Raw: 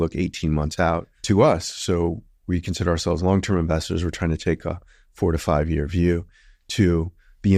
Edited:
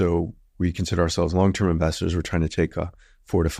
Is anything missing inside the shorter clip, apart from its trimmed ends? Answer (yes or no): no